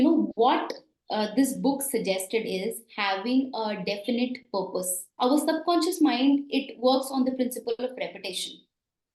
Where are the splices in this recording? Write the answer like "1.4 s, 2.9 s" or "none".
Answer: 5.1 s